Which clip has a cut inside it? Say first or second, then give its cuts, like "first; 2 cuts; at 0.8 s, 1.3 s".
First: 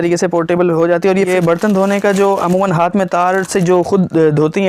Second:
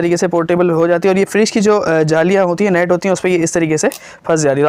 first; 1 cut; at 1.3 s